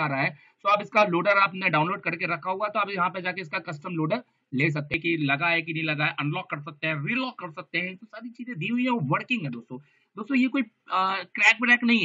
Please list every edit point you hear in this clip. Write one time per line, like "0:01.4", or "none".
0:04.9